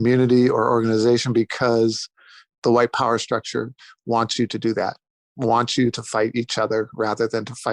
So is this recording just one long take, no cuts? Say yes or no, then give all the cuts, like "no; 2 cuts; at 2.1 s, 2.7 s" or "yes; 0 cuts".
yes; 0 cuts